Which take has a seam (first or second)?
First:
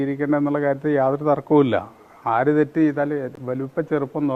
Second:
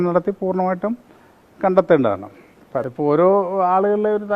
second